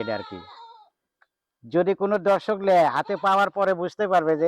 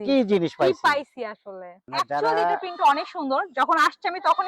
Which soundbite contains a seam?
second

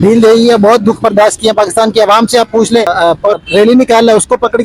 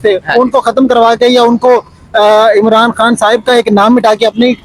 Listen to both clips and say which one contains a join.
first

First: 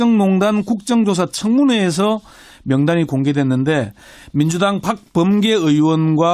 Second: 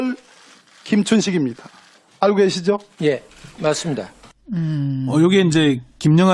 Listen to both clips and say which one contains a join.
first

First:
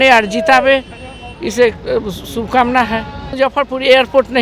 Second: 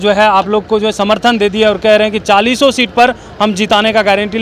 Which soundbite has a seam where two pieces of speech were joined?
first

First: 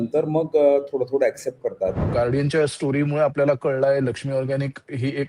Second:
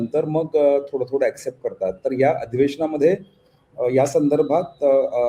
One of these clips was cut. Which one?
first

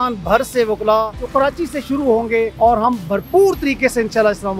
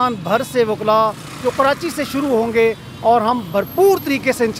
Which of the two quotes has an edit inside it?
first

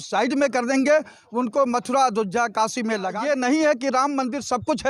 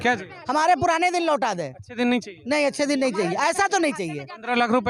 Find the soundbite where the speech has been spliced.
first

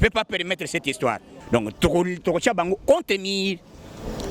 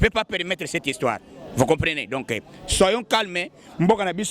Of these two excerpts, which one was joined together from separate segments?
first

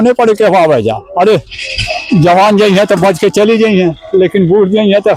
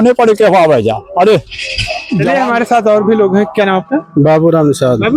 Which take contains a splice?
second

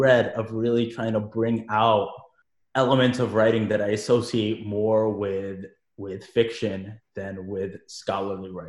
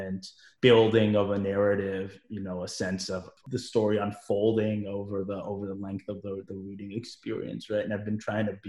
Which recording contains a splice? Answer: second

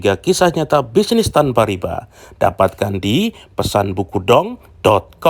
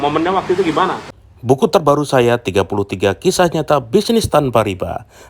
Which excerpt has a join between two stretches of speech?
second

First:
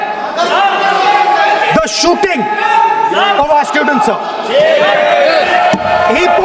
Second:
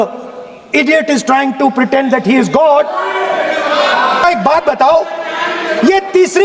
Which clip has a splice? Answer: second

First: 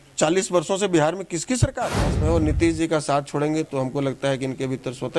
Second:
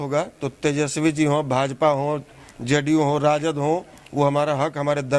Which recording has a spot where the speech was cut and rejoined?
first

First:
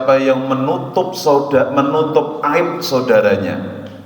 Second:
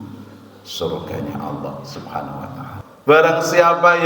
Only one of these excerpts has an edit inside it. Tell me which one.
second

